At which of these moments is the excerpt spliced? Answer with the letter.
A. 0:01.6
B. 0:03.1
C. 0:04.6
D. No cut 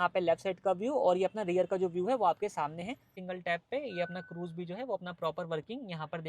B